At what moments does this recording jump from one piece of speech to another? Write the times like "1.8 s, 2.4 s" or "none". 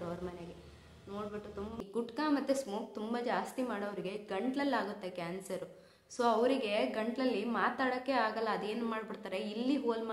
1.8 s